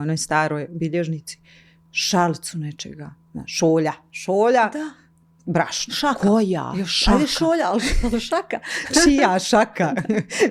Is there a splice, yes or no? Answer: no